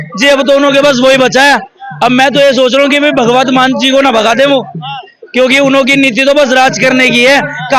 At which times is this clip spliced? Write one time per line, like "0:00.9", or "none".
none